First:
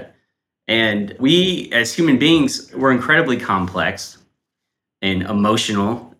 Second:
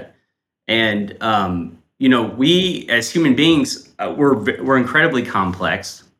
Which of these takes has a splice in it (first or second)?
first